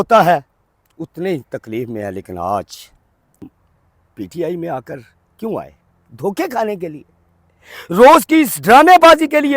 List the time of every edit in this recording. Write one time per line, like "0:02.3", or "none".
0:03.5